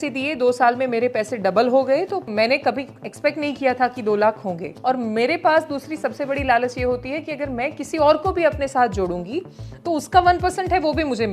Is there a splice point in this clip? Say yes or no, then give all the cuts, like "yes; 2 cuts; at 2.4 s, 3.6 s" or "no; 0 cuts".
yes; 2 cuts; at 2.3 s, 4.7 s